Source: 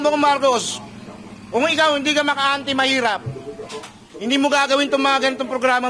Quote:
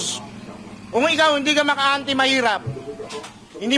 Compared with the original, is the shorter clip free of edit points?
yes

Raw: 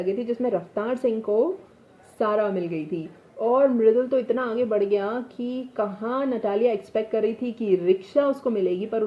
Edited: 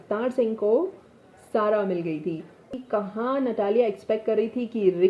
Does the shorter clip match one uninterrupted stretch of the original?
no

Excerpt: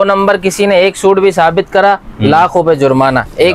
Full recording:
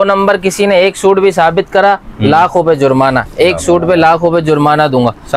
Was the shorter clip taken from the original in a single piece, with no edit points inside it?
yes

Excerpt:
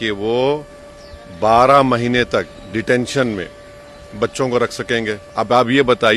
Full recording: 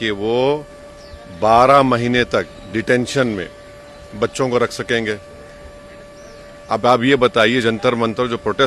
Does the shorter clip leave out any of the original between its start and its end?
yes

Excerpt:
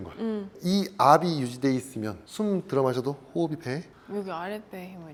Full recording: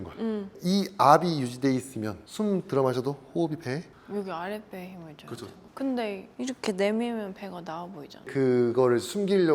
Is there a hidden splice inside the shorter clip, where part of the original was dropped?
no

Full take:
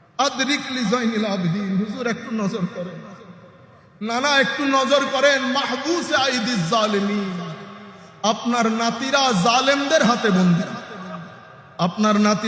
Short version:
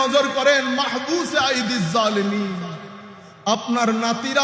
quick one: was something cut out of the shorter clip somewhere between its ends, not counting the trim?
no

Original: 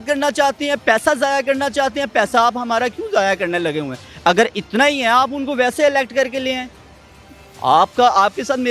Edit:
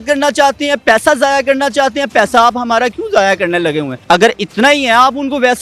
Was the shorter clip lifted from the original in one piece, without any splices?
no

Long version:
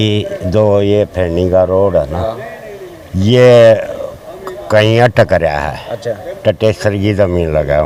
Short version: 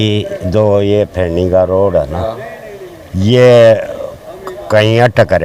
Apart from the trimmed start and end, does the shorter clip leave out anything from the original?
no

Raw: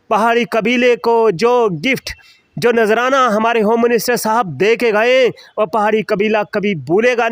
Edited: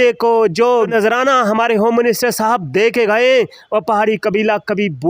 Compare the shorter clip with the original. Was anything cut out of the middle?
yes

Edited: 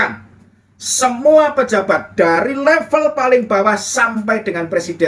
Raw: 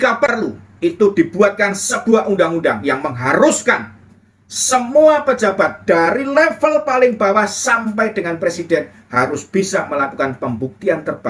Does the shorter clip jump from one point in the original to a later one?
no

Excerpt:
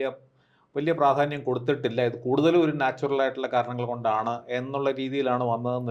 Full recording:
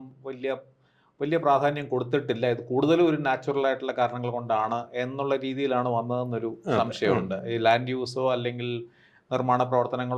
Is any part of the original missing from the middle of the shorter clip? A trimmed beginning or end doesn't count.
no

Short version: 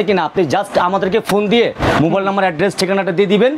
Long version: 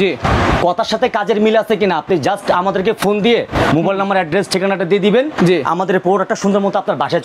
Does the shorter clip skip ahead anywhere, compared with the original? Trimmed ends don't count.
no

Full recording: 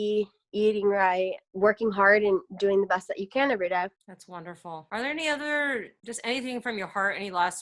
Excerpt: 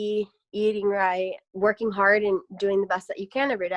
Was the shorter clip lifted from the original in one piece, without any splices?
yes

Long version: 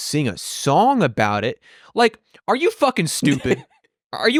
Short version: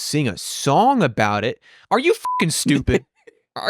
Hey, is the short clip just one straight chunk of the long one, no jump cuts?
no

